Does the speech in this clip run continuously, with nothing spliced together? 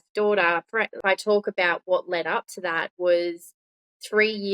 no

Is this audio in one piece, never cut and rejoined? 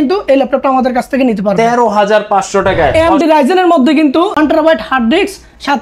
no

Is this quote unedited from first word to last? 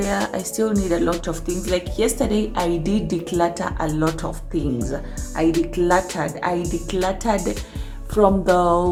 yes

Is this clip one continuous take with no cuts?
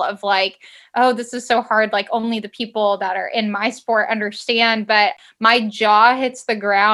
no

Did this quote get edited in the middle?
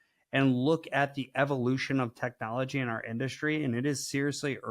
no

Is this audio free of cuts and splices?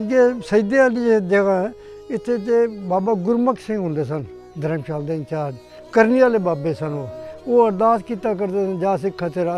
no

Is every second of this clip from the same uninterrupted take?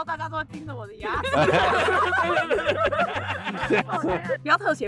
yes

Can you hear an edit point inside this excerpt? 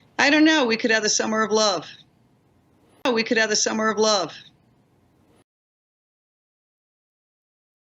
no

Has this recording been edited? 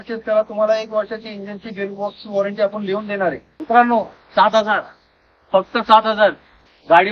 yes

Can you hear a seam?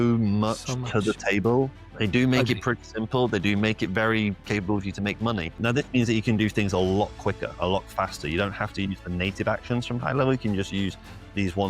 yes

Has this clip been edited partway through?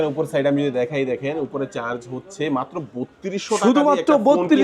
no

